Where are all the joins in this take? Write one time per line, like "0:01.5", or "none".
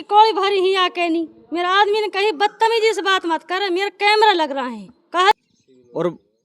0:05.4